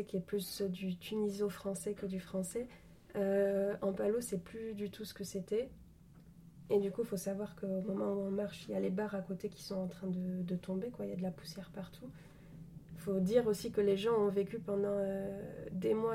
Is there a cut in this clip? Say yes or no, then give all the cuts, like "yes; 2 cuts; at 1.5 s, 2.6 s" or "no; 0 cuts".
no; 0 cuts